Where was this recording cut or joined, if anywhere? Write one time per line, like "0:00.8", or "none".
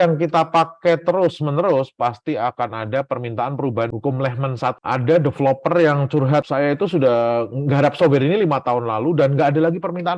0:03.9
0:04.8
0:06.4